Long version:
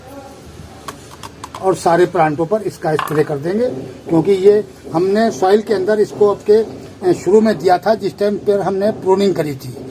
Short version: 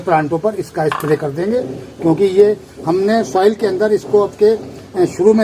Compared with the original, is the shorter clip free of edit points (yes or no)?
yes